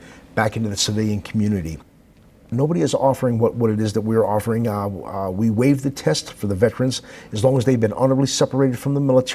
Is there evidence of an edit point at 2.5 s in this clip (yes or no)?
yes